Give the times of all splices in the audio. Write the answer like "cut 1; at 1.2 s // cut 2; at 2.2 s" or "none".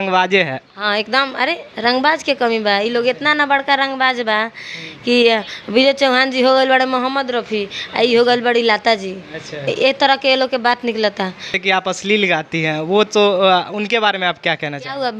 cut 1; at 11.5 s